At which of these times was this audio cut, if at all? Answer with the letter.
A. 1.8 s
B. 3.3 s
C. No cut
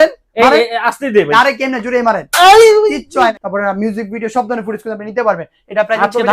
B